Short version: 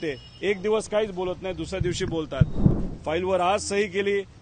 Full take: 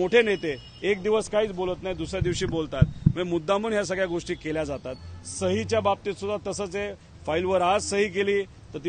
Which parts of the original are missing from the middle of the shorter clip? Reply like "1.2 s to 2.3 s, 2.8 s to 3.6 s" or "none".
3.1 s to 6.9 s